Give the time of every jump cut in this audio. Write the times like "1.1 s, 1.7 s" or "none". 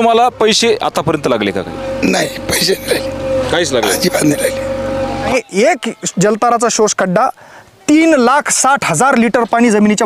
5.3 s